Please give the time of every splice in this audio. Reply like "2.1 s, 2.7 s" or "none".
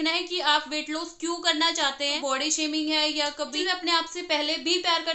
2.2 s, 3.5 s